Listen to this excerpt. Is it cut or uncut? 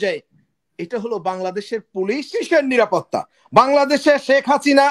cut